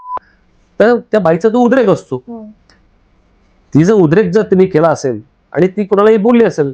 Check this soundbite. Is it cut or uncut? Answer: uncut